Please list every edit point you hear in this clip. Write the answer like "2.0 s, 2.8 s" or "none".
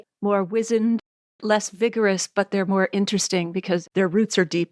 3.8 s